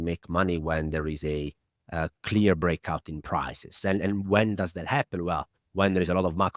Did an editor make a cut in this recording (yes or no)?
no